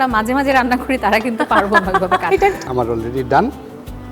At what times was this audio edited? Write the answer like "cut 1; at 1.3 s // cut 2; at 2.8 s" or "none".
cut 1; at 2.6 s